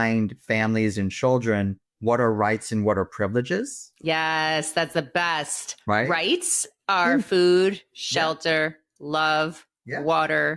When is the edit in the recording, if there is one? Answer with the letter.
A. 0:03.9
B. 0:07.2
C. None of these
C